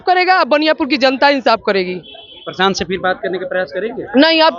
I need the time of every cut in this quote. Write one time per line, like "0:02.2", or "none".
none